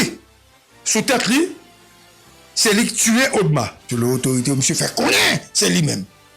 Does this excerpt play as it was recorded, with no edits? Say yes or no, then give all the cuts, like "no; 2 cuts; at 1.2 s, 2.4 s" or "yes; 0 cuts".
no; 1 cut; at 3.8 s